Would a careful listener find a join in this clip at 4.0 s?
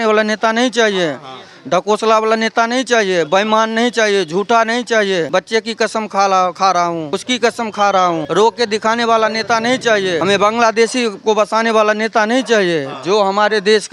no; 4 cuts; at 5.3 s, 7.1 s, 8.2 s, 10.2 s

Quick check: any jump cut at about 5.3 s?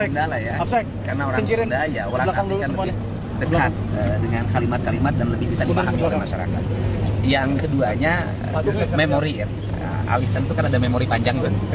no; 0 cuts

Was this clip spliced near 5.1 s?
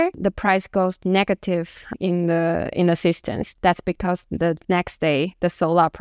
no; 0 cuts

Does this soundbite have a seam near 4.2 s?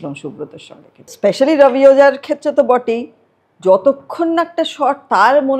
no; 1 cut; at 1.1 s

